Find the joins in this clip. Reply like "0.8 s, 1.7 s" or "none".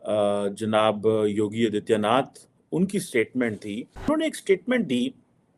4.1 s